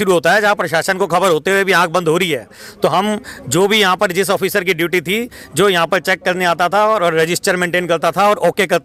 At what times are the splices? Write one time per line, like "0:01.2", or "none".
none